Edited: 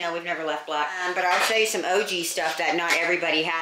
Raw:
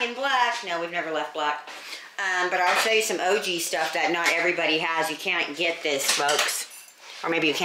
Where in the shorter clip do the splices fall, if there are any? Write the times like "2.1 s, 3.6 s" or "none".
1.0 s